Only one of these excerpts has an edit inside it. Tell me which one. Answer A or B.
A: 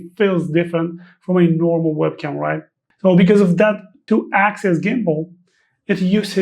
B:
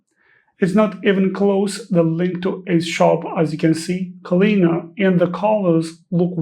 A